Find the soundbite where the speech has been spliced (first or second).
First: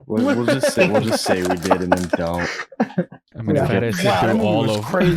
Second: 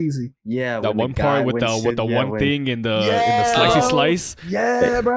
first